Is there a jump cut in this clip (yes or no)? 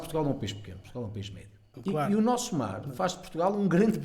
yes